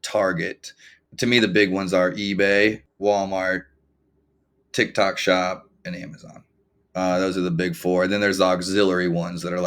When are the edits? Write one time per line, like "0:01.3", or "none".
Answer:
0:01.0
0:02.9